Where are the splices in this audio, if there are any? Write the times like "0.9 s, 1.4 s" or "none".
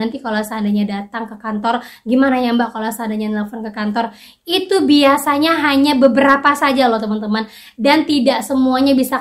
none